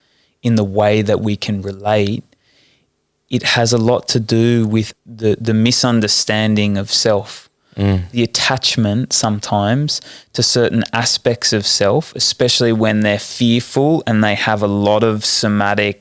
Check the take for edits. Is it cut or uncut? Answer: cut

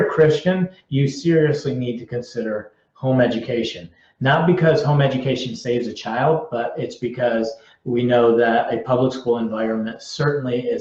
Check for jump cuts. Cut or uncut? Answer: uncut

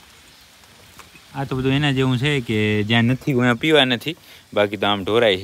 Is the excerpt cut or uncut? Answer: uncut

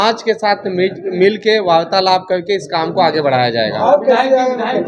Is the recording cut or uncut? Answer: uncut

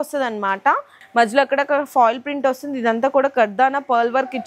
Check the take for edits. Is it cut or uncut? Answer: cut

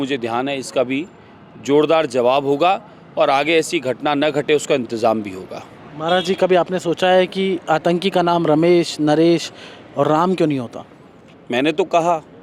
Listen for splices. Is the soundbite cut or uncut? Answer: uncut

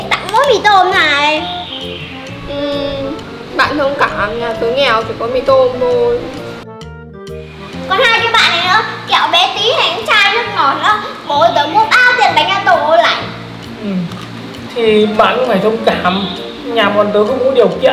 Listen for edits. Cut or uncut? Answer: uncut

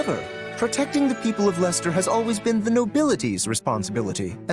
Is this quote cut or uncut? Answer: uncut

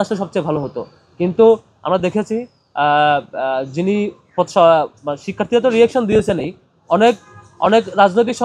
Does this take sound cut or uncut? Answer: uncut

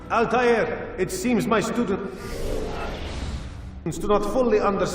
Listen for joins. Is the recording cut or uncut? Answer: uncut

